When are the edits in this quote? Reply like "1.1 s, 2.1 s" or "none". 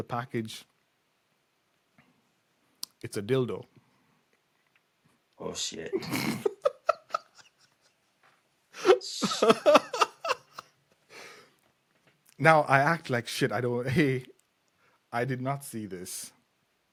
none

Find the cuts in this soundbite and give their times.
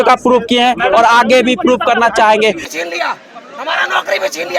2.6 s

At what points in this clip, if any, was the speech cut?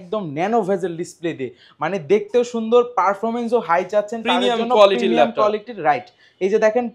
none

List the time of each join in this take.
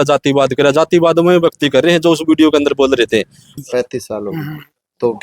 3.5 s

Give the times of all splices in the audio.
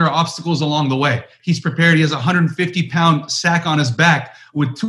1.3 s

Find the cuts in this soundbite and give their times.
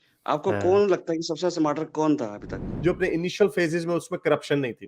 2.6 s

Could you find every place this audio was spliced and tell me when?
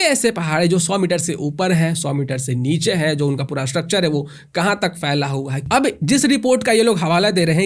5.6 s

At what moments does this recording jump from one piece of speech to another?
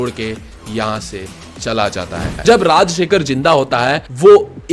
2.3 s

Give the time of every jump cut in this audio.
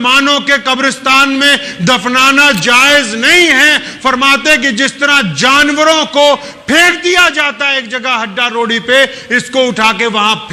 none

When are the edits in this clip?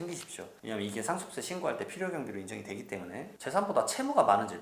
3.3 s

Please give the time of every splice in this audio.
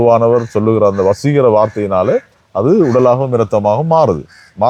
none

